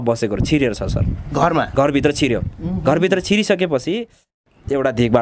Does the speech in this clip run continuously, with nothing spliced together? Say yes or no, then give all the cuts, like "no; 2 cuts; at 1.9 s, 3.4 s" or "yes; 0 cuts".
no; 1 cut; at 4.2 s